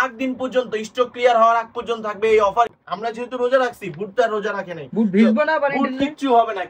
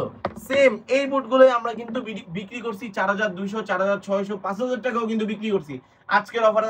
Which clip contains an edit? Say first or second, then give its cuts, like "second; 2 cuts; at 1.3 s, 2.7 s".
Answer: first; 1 cut; at 2.8 s